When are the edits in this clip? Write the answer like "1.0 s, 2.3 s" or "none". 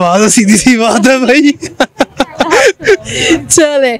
none